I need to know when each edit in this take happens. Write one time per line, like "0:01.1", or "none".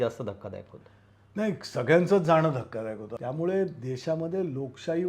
0:03.1